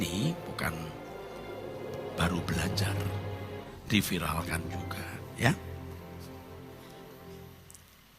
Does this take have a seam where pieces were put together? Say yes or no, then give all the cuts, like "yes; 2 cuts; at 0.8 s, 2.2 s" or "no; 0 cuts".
yes; 1 cut; at 3.7 s